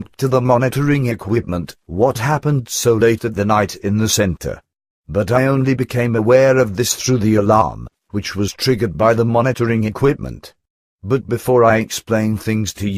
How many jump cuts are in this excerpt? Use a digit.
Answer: 1